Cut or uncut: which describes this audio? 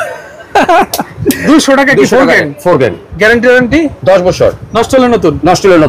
cut